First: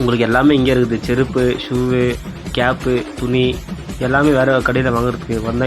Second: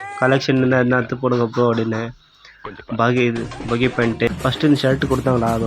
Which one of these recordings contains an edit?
second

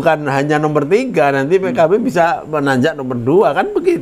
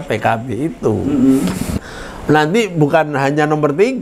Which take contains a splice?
second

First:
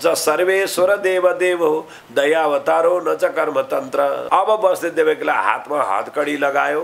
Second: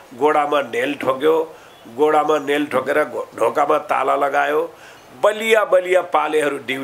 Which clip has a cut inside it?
first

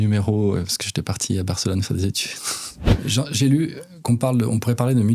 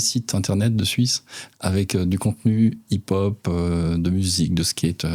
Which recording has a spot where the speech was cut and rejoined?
first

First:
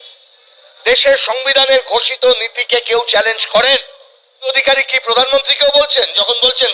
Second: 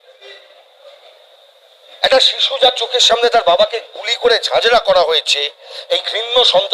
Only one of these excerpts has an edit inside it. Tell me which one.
first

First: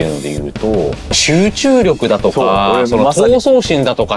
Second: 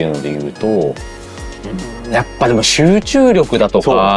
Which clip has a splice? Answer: first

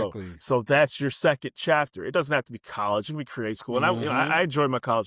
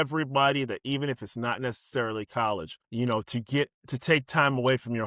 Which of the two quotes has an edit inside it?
second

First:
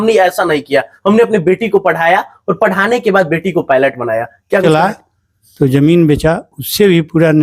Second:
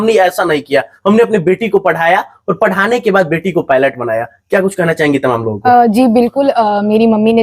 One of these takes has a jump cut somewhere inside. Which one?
first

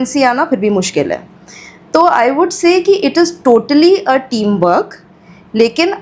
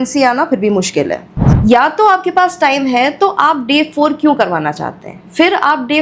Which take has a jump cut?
second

